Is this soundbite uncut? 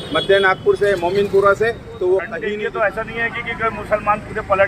no; 1 cut; at 2.3 s

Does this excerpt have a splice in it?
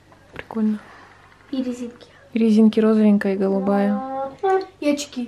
no; 0 cuts

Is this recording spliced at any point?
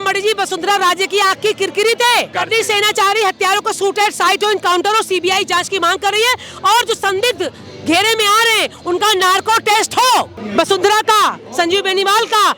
yes; 2 cuts; at 2.3 s, 10.4 s

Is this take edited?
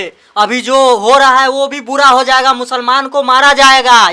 no; 0 cuts

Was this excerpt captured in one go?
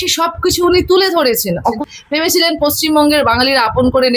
no; 1 cut; at 1.6 s

